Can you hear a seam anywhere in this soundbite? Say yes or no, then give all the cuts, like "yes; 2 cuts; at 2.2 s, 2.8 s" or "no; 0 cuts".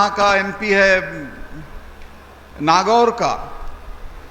no; 0 cuts